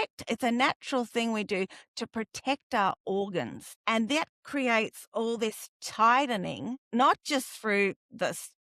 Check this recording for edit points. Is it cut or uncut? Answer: cut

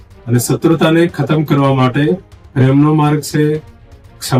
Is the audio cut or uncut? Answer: uncut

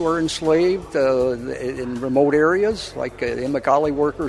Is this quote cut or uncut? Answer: uncut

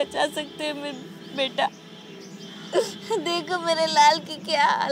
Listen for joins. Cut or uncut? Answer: uncut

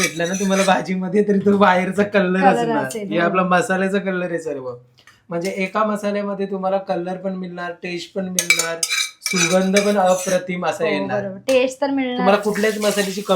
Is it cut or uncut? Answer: uncut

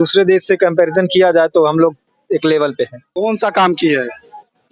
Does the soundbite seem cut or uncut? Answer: cut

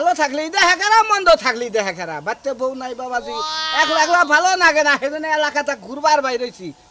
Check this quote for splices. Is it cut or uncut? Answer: uncut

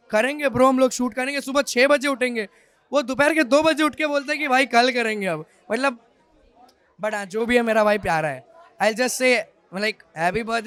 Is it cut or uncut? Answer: uncut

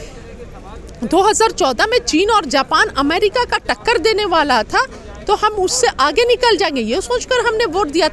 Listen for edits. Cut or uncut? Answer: uncut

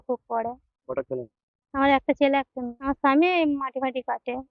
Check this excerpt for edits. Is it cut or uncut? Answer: cut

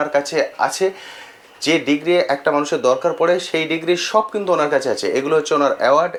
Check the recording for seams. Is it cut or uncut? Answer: uncut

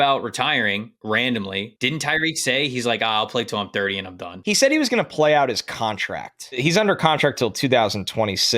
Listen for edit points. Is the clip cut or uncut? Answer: cut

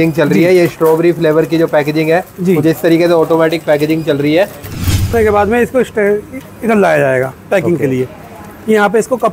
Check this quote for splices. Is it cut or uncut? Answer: cut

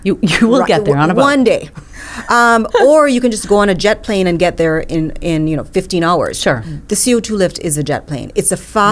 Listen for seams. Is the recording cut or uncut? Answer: cut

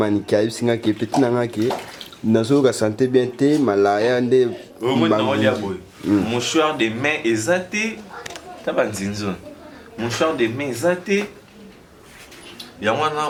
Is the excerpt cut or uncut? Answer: uncut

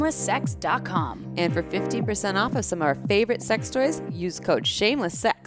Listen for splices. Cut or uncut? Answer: uncut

